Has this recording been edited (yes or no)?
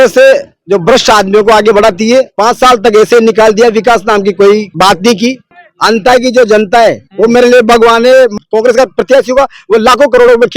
yes